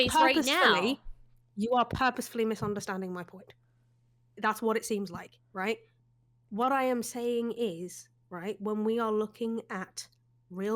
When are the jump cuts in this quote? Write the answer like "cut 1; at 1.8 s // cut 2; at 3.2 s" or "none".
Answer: none

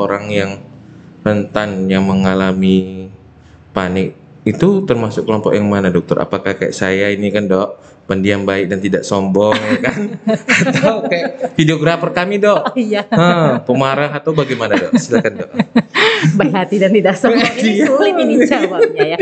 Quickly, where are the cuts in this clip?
none

